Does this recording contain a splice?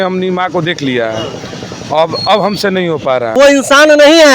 yes; 1 cut; at 3.3 s

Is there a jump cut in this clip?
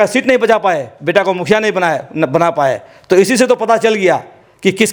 no; 0 cuts

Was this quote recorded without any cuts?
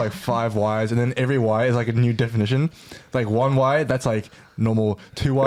yes; 0 cuts

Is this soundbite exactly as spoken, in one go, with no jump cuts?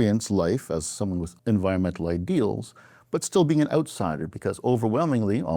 no; 1 cut; at 1.3 s

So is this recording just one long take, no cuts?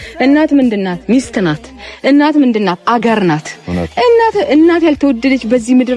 yes; 0 cuts

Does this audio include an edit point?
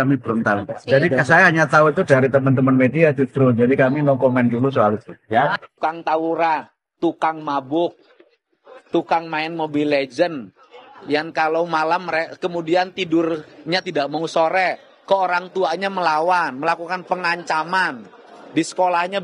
yes; 1 cut; at 5.8 s

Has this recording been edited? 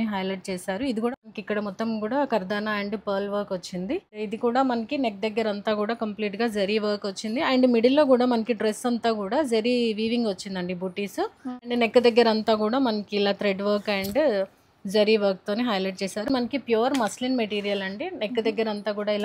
yes; 4 cuts; at 1.1 s, 4.2 s, 11.6 s, 16.3 s

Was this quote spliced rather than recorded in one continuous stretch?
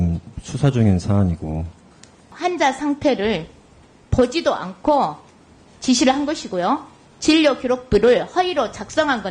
yes; 1 cut; at 2.3 s

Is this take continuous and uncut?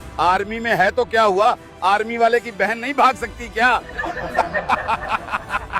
yes; 0 cuts

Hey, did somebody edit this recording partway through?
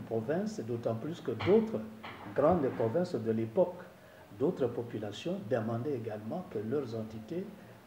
no; 0 cuts

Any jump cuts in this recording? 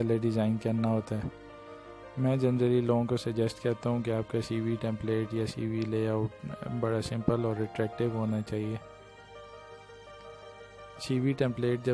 no; 0 cuts

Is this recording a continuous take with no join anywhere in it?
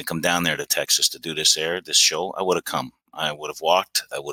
yes; 0 cuts

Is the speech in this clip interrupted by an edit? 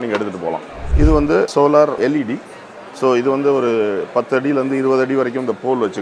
no; 0 cuts

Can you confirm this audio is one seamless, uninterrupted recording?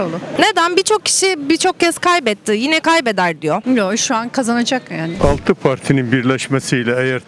no; 1 cut; at 5.1 s

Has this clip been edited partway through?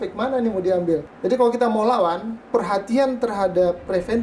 yes; 2 cuts; at 1.1 s, 2.3 s

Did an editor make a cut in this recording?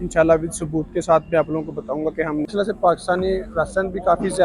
yes; 1 cut; at 2.5 s

